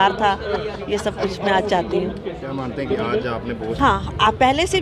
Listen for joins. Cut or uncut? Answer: uncut